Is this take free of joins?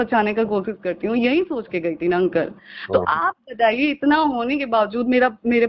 yes; 0 cuts

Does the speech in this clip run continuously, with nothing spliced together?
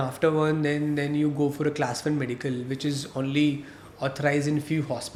yes; 0 cuts

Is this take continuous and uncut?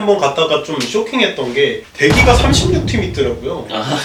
yes; 0 cuts

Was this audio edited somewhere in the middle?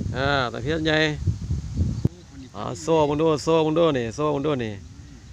yes; 1 cut; at 2.2 s

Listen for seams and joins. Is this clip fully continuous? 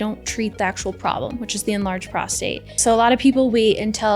no; 1 cut; at 2.8 s

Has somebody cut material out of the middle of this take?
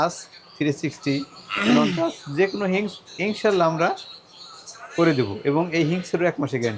no; 0 cuts

